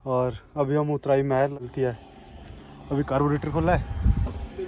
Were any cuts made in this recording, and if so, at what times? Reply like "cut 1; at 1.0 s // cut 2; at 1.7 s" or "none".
cut 1; at 1.7 s